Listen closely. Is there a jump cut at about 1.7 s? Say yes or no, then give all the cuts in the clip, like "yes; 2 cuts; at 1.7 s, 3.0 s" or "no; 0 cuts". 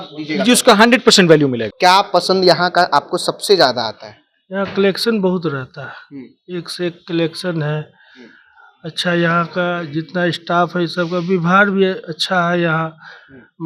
yes; 1 cut; at 1.7 s